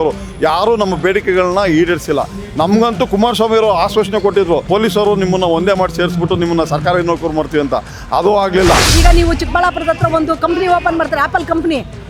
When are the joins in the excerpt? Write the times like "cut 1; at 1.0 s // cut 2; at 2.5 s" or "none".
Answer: cut 1; at 4.7 s // cut 2; at 8.9 s